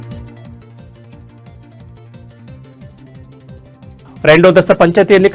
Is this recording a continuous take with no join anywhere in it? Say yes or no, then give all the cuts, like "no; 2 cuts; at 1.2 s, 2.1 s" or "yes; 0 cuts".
no; 1 cut; at 4.0 s